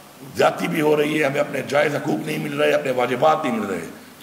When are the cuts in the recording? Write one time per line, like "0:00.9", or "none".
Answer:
none